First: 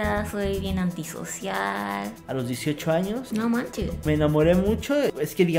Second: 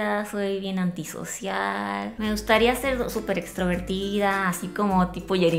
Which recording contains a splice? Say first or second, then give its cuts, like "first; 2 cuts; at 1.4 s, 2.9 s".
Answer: first; 1 cut; at 2.2 s